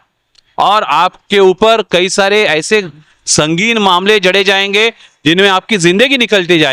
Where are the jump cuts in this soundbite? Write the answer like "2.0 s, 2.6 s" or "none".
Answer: none